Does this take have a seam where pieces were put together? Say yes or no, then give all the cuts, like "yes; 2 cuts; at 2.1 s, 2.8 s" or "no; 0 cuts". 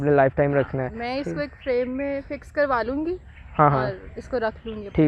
no; 0 cuts